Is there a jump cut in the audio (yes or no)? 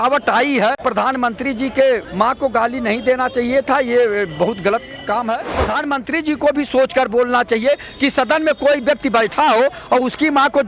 yes